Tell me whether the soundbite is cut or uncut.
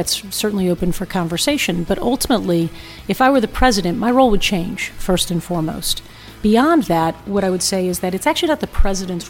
cut